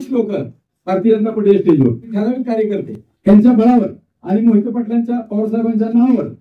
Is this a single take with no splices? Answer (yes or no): no